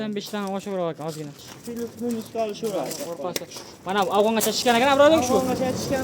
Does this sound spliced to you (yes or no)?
yes